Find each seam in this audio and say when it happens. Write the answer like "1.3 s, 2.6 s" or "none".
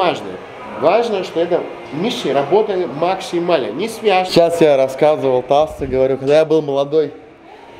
4.3 s